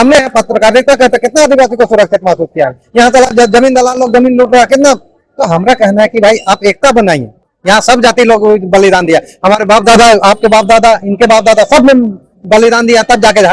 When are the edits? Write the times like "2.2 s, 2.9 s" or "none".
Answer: none